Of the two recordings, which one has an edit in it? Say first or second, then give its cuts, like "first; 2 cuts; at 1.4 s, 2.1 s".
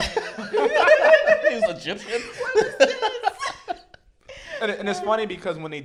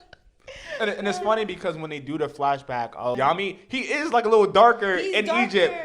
second; 1 cut; at 3.2 s